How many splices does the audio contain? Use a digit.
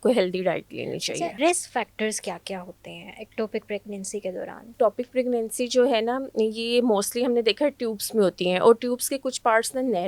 2